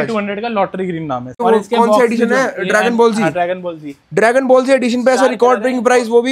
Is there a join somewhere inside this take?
yes; 1 cut; at 1.3 s

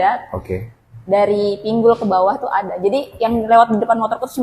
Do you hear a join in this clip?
no; 0 cuts

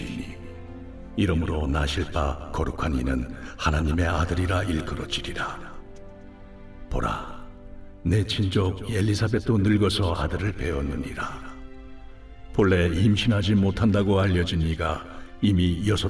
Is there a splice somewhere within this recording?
yes; 1 cut; at 6.5 s

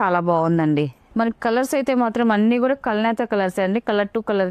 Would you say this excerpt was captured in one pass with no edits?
no; 1 cut; at 1.1 s

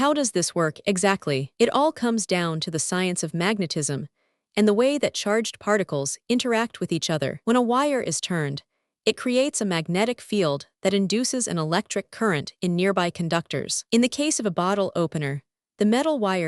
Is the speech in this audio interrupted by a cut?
yes; 1 cut; at 1.5 s

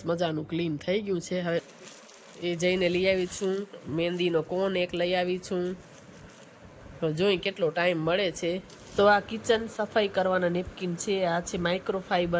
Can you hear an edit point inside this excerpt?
yes; 2 cuts; at 1.6 s, 8.8 s

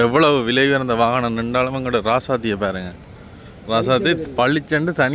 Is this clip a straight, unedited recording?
yes; 0 cuts

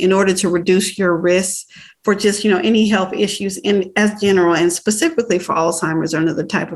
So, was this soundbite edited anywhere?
no; 0 cuts

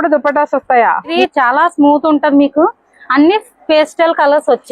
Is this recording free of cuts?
no; 1 cut; at 1.1 s

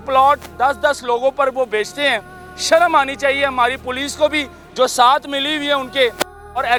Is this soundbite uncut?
yes; 0 cuts

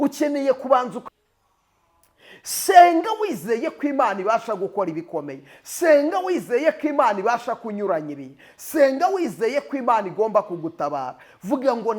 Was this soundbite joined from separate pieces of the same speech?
yes; 1 cut; at 1.0 s

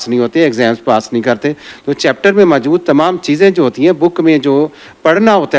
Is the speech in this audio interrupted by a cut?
yes; 1 cut; at 1.7 s

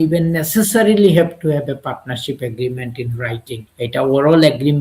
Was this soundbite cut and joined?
yes; 1 cut; at 3.7 s

